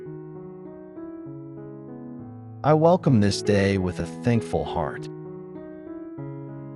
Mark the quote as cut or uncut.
cut